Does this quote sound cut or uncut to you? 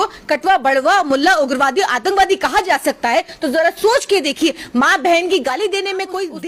uncut